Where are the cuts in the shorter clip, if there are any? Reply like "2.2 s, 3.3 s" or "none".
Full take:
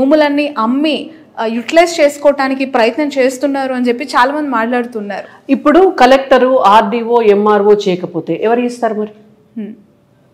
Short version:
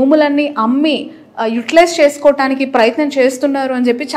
none